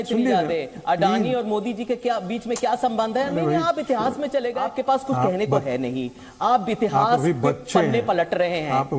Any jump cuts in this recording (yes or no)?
yes